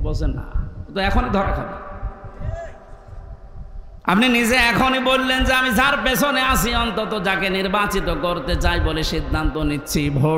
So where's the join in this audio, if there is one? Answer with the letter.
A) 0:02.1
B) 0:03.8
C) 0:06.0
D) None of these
B